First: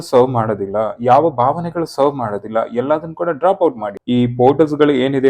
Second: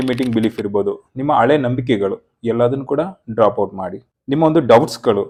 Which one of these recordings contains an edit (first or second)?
first